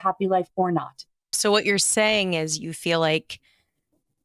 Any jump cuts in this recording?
yes; 1 cut; at 1.3 s

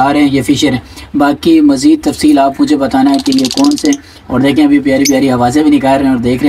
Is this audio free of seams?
yes; 0 cuts

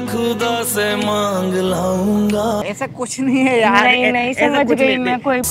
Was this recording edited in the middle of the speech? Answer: yes; 1 cut; at 2.6 s

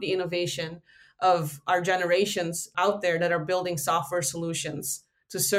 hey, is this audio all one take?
yes; 0 cuts

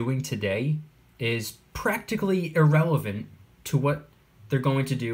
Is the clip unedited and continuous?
yes; 0 cuts

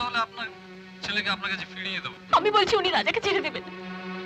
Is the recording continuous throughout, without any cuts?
yes; 0 cuts

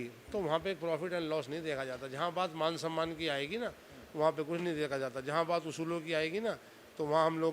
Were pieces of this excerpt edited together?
no; 0 cuts

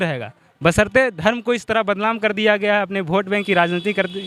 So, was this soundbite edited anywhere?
no; 0 cuts

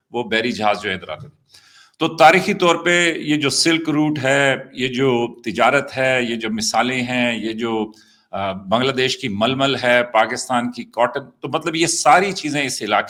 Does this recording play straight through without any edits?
yes; 0 cuts

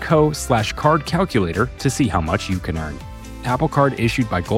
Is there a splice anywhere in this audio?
no; 0 cuts

